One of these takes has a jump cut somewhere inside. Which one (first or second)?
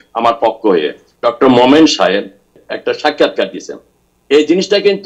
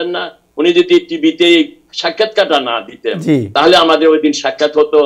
first